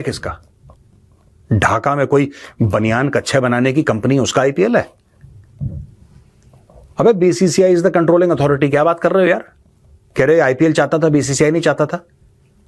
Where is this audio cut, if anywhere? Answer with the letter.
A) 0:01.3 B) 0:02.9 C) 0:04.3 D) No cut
D